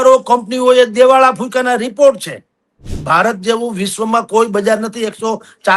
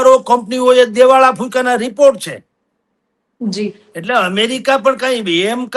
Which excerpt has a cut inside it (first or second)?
first